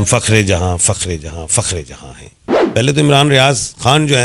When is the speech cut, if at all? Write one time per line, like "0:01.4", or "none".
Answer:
0:02.5